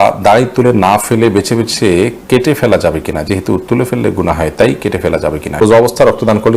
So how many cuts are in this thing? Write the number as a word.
one